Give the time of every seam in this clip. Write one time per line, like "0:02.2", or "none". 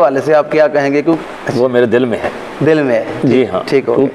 0:01.2